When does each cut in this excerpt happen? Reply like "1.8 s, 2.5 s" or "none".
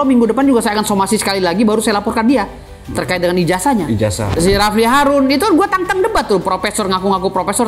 4.3 s